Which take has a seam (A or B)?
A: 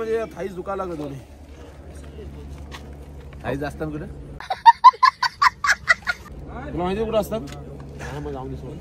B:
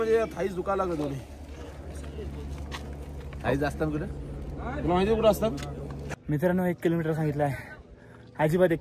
B